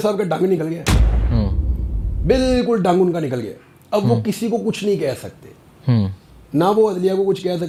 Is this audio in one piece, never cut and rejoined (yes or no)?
yes